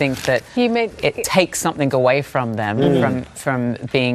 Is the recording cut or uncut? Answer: uncut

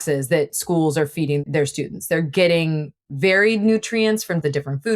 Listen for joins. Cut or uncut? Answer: cut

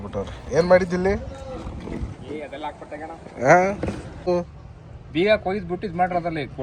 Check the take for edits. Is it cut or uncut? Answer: cut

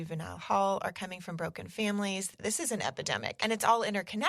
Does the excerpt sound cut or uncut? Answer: cut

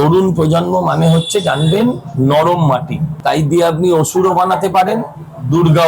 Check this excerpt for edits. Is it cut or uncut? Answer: cut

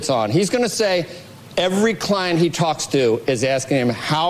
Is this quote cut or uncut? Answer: uncut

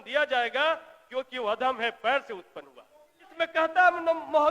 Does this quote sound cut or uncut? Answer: cut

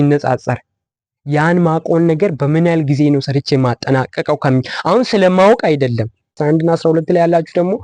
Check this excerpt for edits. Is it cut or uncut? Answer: cut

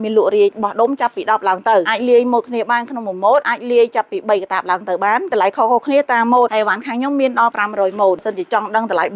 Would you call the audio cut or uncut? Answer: uncut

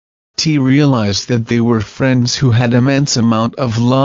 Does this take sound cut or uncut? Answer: cut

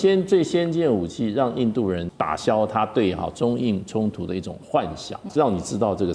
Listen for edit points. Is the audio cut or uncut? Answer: cut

